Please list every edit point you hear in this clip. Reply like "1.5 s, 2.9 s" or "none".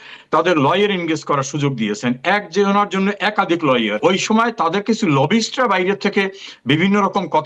4.0 s